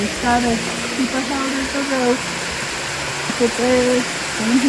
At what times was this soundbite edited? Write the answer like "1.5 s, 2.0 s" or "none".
3.3 s